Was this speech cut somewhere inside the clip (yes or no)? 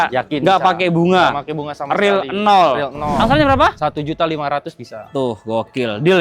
yes